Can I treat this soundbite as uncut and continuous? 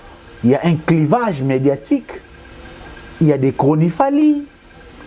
yes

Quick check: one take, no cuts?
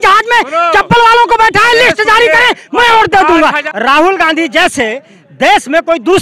no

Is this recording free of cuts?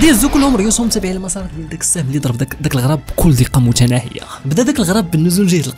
yes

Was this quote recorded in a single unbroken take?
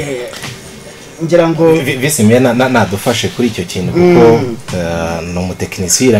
yes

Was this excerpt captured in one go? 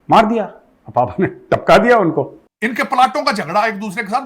no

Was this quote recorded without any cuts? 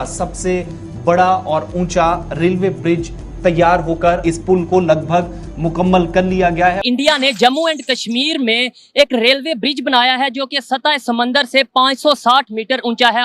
no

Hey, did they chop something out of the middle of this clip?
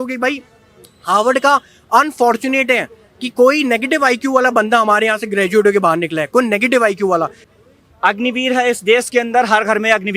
yes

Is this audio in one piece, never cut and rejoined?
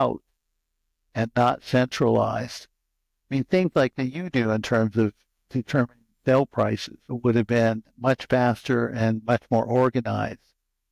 yes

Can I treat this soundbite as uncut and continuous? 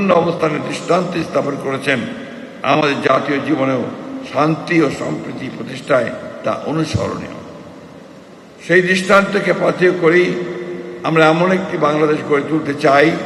yes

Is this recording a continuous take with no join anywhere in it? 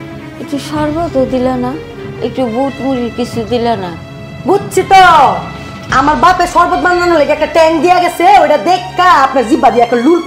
yes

